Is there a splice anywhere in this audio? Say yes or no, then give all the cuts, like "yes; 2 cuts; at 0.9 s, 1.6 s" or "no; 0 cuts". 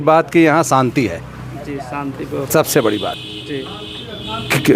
no; 0 cuts